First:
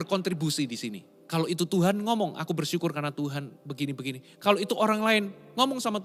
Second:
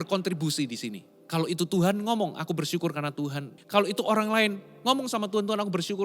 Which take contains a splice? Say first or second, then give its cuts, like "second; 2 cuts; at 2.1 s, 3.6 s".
second; 1 cut; at 3.6 s